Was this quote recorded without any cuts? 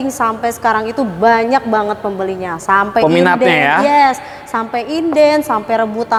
yes; 0 cuts

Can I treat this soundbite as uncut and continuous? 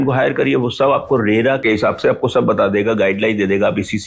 no; 1 cut; at 1.6 s

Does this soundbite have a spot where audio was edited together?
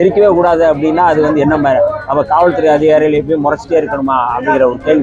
no; 0 cuts

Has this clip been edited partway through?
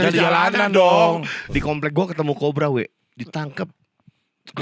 yes; 1 cut; at 1.5 s

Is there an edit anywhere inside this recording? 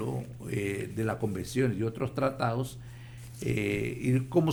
no; 0 cuts

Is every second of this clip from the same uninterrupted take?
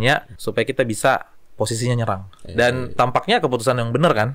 no; 1 cut; at 2.4 s

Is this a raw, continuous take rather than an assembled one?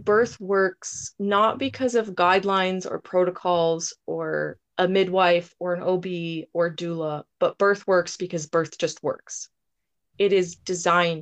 no; 1 cut; at 4.6 s

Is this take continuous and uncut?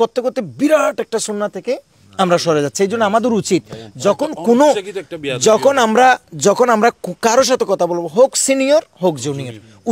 yes; 0 cuts

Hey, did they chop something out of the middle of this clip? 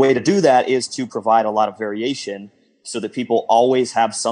yes; 1 cut; at 2.8 s

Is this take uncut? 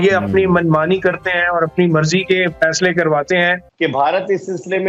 no; 1 cut; at 3.7 s

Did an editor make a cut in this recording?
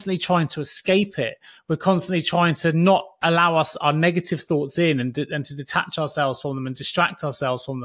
no; 0 cuts

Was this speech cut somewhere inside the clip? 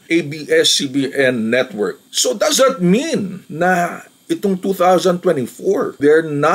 no; 0 cuts

